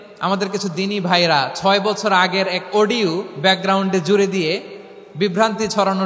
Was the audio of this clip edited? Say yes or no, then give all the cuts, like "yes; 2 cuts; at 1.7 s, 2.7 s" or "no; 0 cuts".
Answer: no; 0 cuts